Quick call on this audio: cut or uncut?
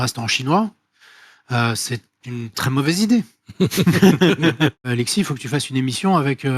cut